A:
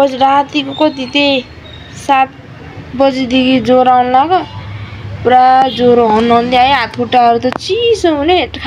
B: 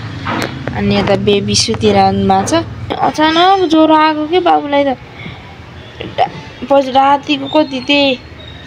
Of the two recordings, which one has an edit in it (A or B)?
B